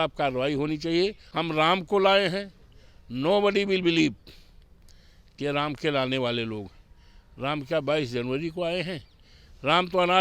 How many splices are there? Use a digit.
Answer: 1